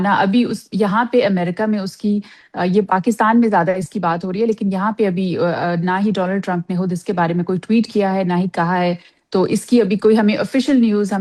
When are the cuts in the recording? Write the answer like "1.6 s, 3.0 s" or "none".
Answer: none